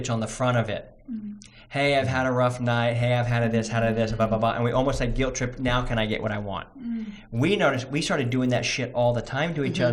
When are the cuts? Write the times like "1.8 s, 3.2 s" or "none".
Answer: none